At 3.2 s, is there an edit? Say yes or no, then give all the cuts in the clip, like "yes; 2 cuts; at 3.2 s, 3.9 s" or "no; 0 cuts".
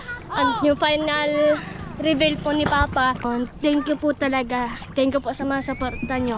yes; 1 cut; at 3.2 s